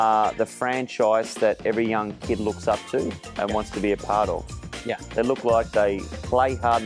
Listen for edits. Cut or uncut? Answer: uncut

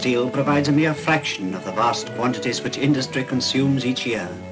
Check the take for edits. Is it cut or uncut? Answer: uncut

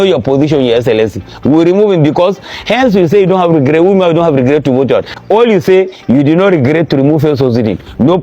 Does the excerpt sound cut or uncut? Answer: cut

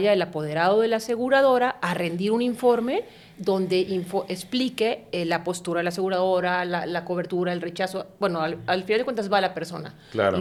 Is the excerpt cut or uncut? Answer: uncut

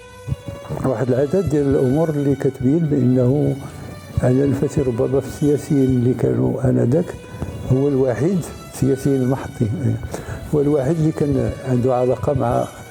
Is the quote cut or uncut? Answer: uncut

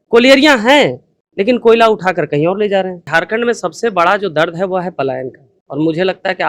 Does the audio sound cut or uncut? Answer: cut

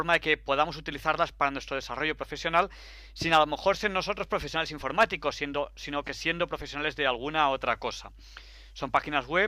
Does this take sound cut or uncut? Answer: cut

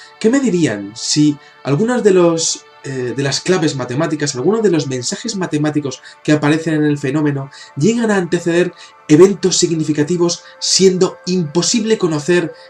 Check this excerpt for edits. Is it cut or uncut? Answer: cut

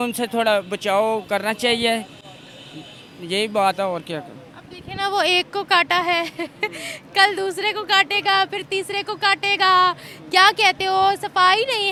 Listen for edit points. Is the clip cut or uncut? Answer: uncut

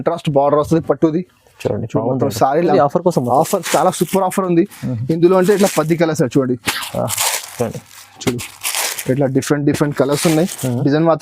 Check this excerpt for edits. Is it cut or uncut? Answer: cut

